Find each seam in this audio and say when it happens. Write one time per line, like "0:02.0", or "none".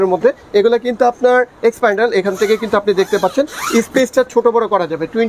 none